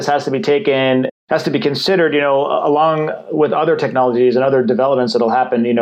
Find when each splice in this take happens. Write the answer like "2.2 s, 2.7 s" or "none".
1.1 s

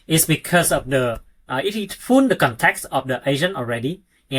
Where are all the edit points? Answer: none

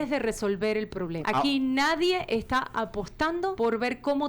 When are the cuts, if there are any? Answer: 1.2 s, 3.5 s

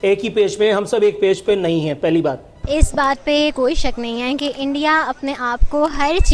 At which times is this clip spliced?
2.6 s

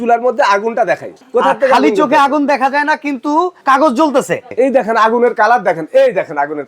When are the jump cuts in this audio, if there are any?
1.2 s, 3.6 s, 4.5 s

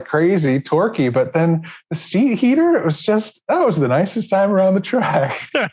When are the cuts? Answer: none

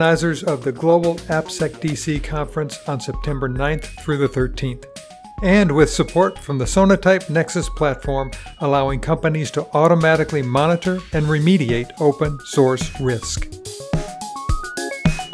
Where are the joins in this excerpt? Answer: 13.4 s

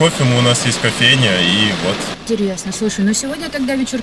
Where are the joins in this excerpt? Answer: none

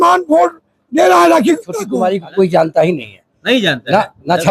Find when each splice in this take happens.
1.8 s

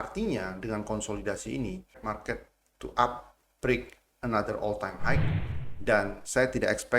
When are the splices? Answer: 2.0 s

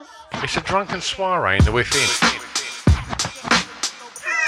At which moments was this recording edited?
none

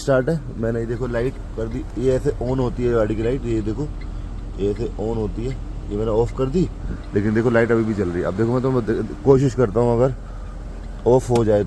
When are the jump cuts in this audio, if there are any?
none

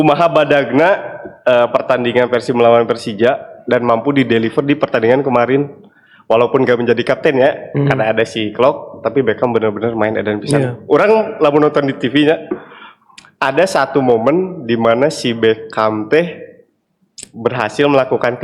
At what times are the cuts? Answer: none

